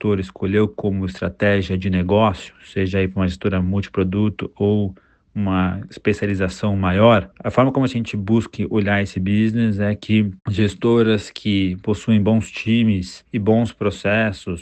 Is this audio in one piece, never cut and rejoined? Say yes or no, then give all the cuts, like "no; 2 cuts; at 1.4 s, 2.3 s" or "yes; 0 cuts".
yes; 0 cuts